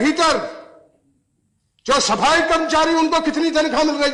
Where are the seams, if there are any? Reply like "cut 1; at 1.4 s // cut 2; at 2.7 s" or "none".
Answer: none